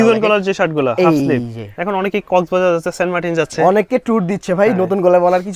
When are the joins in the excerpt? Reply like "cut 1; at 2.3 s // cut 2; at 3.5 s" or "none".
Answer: none